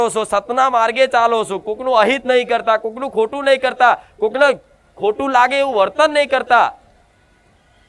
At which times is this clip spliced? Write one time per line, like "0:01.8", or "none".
none

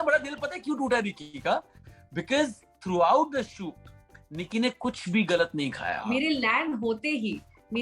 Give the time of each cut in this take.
0:06.0

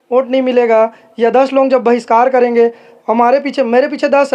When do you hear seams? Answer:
none

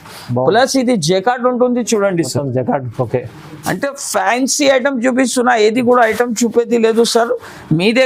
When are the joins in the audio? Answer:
none

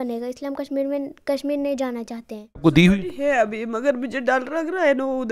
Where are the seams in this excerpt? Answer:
0:02.6

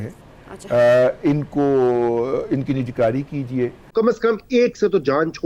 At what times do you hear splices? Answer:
0:03.9

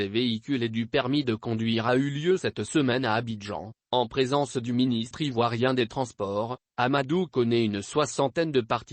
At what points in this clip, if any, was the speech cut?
0:01.3

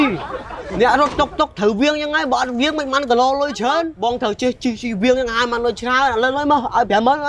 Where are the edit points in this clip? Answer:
0:03.9

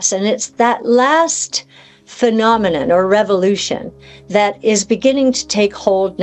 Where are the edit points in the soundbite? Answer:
none

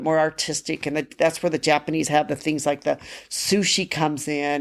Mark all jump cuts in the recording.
none

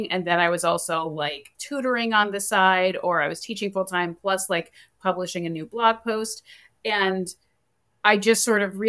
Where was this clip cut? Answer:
none

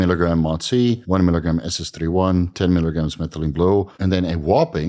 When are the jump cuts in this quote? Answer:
0:01.0
0:03.9

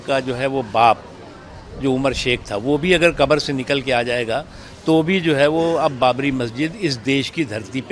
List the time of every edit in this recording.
none

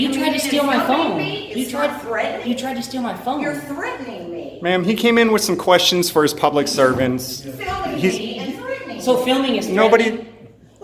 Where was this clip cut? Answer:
none

